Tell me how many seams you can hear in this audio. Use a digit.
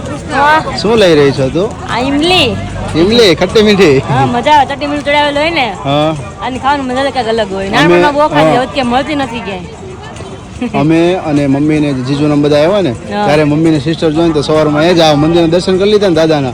0